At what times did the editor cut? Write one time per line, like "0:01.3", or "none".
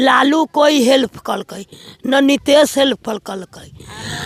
none